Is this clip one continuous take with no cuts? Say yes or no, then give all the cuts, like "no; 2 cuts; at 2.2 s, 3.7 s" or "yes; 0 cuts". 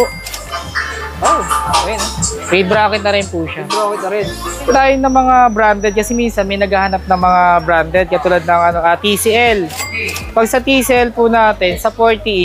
no; 1 cut; at 4.7 s